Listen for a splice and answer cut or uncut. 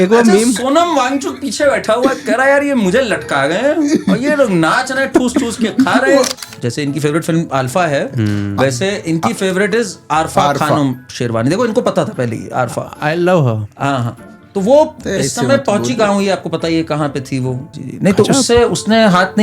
cut